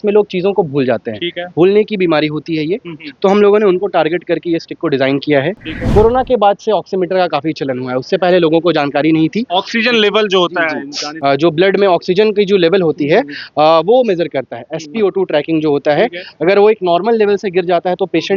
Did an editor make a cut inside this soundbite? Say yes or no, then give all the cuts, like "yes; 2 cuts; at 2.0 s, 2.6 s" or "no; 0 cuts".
yes; 2 cuts; at 5.7 s, 11.0 s